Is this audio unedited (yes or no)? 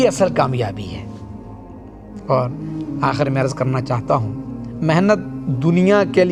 yes